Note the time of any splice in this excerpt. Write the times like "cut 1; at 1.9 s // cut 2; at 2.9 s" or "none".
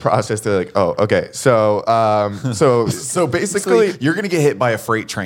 none